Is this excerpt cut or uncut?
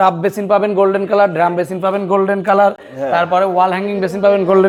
uncut